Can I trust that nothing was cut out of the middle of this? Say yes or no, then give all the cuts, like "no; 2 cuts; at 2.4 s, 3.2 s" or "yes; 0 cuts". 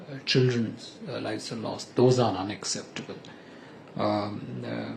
yes; 0 cuts